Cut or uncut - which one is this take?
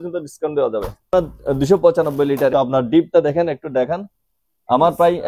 cut